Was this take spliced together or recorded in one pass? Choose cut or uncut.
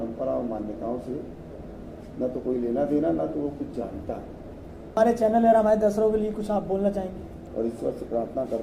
cut